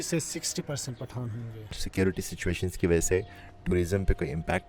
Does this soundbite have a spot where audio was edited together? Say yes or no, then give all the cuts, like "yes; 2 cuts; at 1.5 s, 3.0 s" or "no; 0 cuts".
yes; 1 cut; at 1.8 s